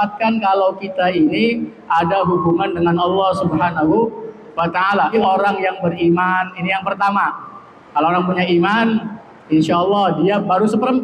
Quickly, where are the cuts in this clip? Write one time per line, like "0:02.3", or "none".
0:05.1